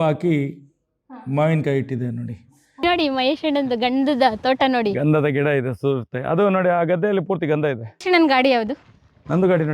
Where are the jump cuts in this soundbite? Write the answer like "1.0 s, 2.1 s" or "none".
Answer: 2.8 s, 8.0 s